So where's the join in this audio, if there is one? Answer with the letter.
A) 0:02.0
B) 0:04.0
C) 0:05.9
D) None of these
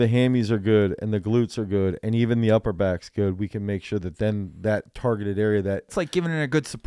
C